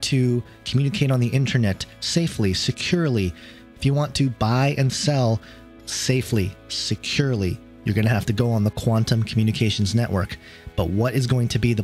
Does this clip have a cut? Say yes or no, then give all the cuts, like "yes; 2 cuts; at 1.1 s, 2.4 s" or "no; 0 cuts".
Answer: no; 0 cuts